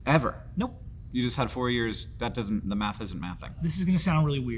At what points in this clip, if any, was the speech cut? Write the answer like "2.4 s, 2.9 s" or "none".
3.5 s

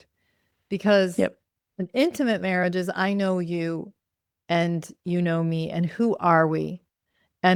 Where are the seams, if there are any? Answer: none

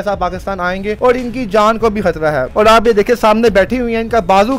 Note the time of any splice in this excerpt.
1.0 s, 2.4 s

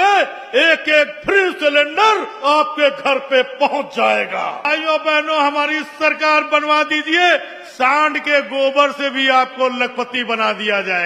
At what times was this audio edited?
4.7 s

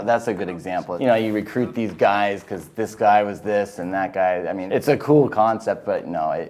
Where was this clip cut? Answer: 0.9 s, 4.6 s

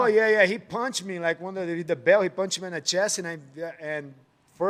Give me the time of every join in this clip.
none

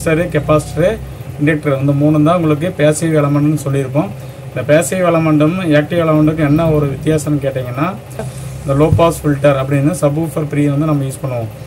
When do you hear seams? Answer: 8.4 s

